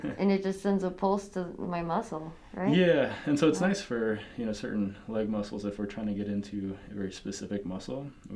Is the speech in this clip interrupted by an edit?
no; 0 cuts

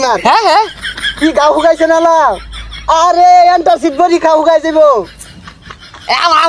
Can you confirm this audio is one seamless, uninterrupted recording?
yes; 0 cuts

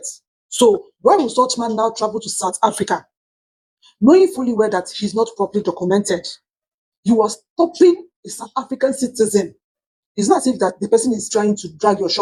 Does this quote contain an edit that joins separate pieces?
no; 0 cuts

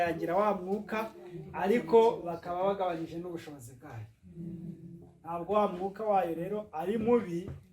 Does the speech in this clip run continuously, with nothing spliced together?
yes; 0 cuts

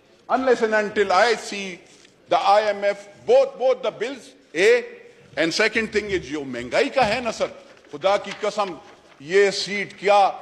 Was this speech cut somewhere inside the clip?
no; 0 cuts

